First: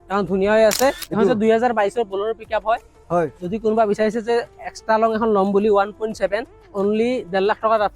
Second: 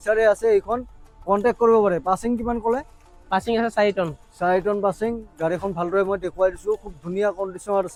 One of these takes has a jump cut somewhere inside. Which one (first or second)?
first